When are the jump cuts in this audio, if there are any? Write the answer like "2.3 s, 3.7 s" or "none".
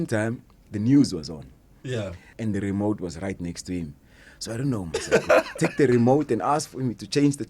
2.2 s